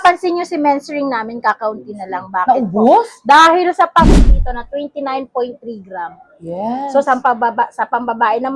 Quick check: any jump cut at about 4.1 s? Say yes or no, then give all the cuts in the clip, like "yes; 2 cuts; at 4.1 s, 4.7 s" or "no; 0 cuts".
yes; 1 cut; at 4.1 s